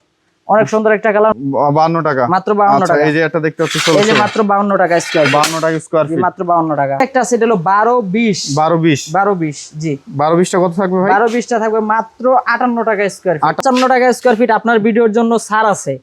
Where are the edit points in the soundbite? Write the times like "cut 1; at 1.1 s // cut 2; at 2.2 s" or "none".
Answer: cut 1; at 1.3 s // cut 2; at 7.0 s // cut 3; at 13.6 s